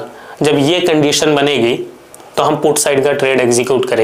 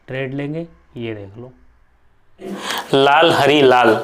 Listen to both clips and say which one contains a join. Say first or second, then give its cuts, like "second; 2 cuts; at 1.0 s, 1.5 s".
second; 1 cut; at 2.6 s